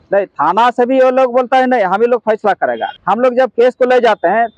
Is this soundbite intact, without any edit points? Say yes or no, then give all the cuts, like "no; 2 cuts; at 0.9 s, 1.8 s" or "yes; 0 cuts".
no; 1 cut; at 2.9 s